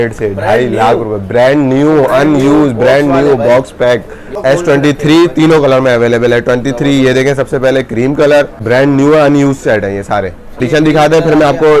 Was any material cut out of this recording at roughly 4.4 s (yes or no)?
yes